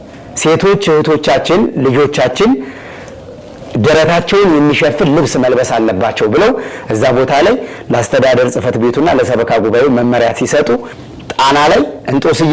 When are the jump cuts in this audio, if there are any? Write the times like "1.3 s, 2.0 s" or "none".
11.0 s